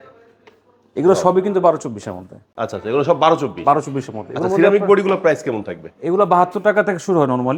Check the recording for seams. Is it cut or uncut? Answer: uncut